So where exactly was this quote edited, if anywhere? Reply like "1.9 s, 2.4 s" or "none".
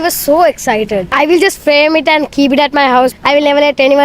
1.1 s, 3.1 s